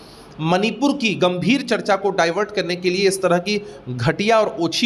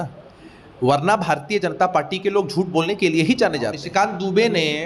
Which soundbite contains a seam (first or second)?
second